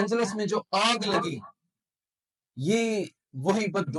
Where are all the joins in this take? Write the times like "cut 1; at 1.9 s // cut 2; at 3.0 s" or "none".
none